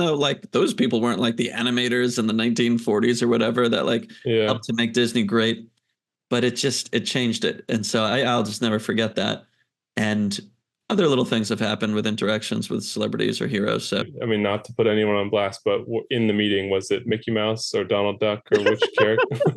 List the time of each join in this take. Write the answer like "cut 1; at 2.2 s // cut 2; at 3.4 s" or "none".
cut 1; at 14.1 s